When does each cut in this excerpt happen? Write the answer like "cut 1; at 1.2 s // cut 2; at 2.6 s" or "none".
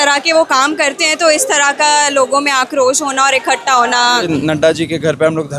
cut 1; at 4.3 s